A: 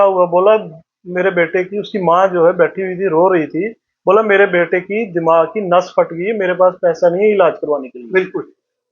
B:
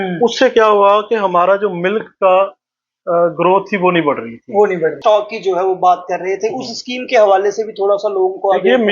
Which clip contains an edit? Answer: B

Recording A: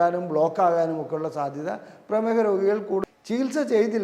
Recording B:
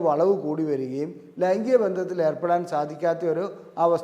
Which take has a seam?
A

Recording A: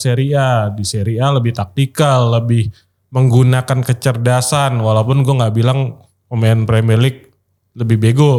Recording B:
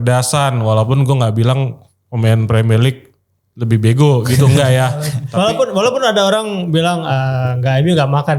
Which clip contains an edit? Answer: B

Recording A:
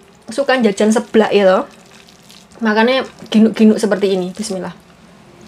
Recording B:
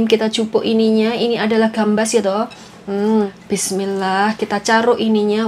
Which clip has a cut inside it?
B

